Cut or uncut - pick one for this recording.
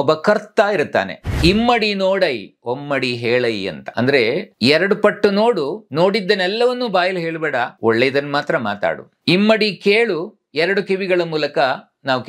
cut